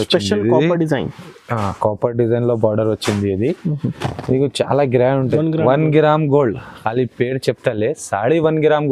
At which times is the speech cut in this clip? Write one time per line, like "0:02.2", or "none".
0:05.3

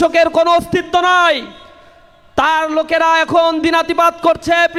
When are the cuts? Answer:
none

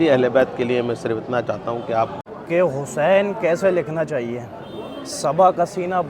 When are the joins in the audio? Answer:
0:02.3

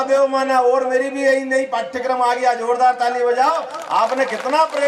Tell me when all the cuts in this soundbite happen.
none

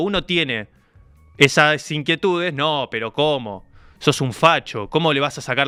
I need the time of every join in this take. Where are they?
none

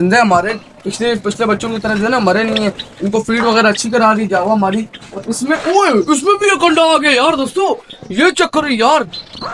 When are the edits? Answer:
none

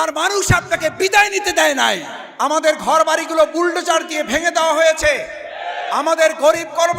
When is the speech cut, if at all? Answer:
0:02.2

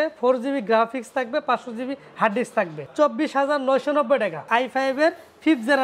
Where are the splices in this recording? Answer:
0:02.8
0:04.4

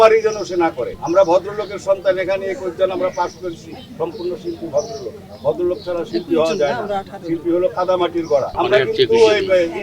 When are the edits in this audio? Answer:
0:00.9
0:08.5

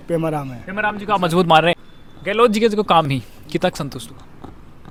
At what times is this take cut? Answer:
none

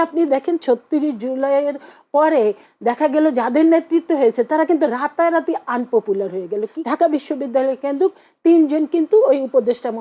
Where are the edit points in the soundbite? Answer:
0:06.7

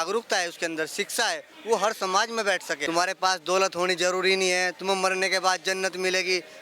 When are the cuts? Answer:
0:02.7

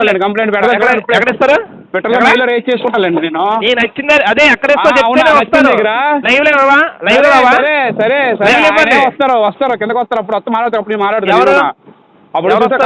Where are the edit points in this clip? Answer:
none

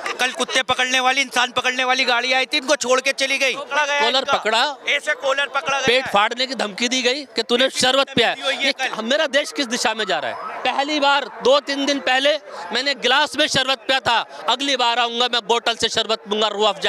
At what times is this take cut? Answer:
0:03.7
0:10.5

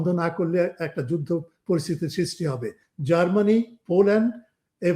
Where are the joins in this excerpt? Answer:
0:02.8

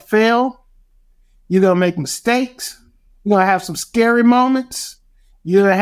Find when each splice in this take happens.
none

